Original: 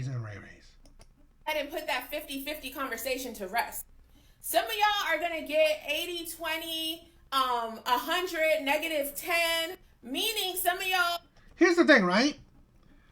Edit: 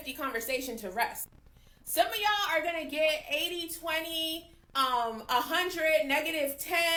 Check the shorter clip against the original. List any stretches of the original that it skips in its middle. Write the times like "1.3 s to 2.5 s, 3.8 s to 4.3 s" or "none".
none